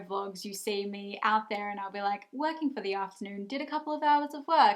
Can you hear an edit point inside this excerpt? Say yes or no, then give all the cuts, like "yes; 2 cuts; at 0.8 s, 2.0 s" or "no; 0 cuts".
no; 0 cuts